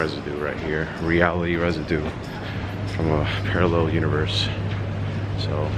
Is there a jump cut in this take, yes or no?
no